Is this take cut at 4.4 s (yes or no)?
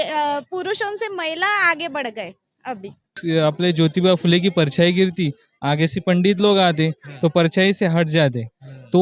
no